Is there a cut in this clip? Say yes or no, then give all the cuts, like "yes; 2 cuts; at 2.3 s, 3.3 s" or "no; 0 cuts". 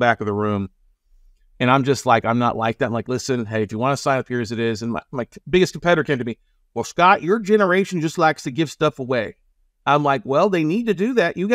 no; 0 cuts